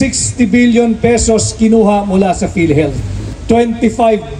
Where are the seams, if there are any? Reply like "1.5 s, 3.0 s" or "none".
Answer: 3.2 s